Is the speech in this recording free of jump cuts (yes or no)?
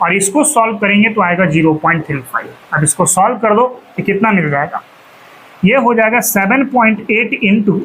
yes